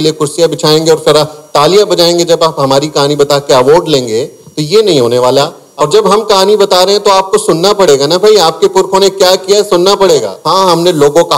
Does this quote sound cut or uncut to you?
cut